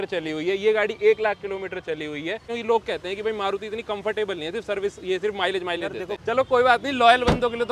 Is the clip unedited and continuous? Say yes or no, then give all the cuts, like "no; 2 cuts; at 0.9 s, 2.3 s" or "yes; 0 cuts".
no; 2 cuts; at 2.5 s, 6.2 s